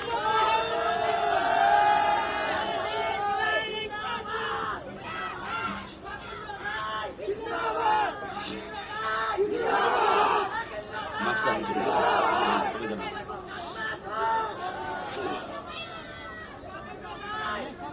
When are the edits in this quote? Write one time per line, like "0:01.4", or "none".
none